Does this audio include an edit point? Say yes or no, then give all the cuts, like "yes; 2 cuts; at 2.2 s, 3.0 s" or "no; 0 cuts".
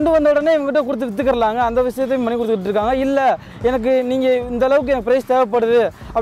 no; 0 cuts